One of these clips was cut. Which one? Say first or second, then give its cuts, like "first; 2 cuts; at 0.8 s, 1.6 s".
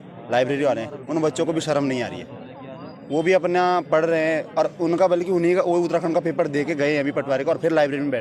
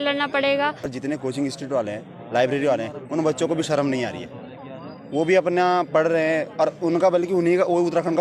second; 1 cut; at 0.9 s